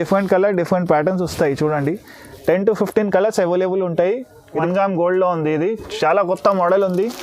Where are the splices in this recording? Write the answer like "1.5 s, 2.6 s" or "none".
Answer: 4.5 s